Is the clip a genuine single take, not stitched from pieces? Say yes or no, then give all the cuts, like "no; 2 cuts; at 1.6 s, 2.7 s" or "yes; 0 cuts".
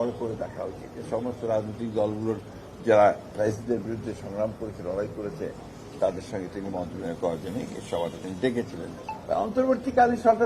no; 1 cut; at 1.0 s